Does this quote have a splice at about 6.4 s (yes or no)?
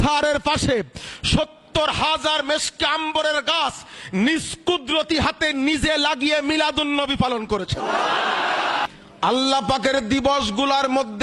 no